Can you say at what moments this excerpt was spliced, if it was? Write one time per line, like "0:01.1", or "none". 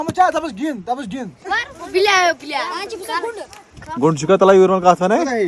0:01.6